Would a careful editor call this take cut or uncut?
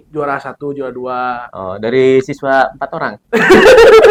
uncut